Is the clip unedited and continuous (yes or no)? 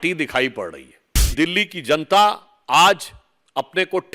no